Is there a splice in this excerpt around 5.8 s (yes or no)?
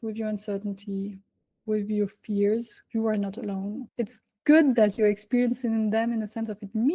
no